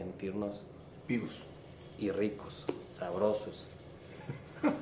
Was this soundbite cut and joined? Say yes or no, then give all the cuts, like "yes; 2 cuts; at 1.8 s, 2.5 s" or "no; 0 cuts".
no; 0 cuts